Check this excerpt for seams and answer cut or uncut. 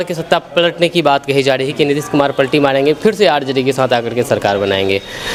uncut